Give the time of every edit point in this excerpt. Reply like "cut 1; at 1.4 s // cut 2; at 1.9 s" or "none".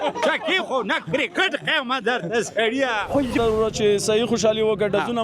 cut 1; at 3.4 s